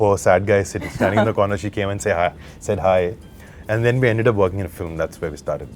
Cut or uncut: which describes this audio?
uncut